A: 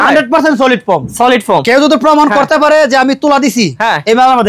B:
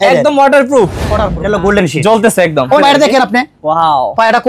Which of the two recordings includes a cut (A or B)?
B